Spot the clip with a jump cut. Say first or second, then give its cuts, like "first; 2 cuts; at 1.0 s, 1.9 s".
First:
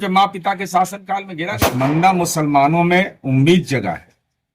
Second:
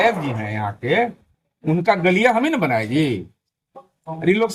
first; 1 cut; at 1.4 s